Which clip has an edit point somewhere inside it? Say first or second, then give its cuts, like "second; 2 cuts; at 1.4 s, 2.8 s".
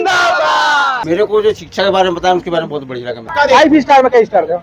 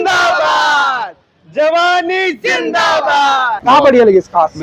first; 2 cuts; at 1.2 s, 3.3 s